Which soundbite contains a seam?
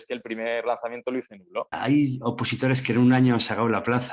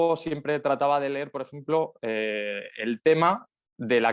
first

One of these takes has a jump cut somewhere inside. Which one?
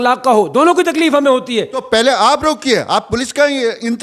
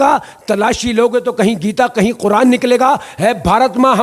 first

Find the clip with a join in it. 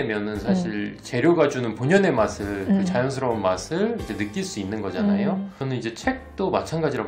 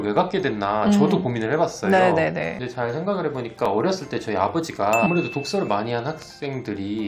second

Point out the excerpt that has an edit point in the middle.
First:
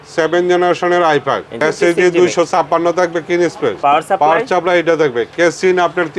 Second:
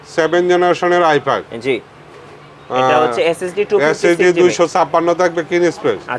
first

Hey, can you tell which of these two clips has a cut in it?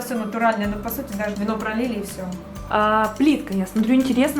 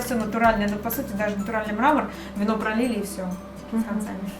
first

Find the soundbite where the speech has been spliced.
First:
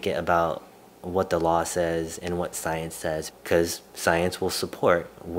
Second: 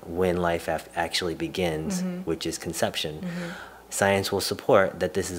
first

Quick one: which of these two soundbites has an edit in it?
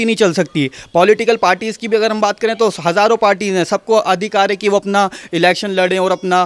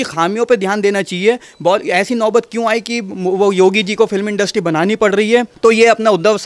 second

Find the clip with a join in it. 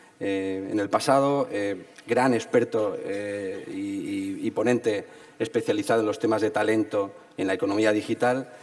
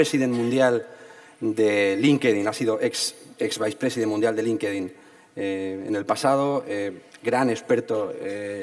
first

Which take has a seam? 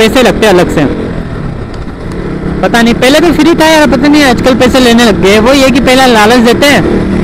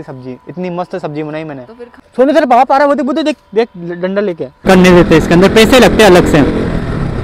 second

